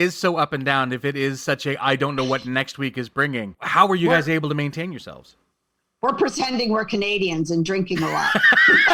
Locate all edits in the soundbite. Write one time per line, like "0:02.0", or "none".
none